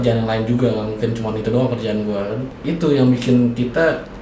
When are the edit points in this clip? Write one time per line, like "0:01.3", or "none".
0:02.5

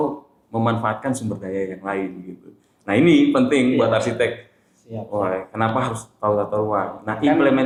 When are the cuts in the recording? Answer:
none

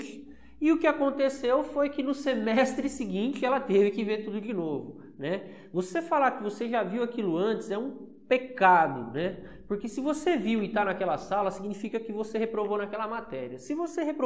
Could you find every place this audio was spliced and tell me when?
none

